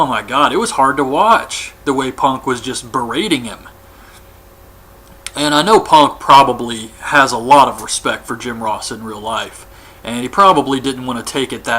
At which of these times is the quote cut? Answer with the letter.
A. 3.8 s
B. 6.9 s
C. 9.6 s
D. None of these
A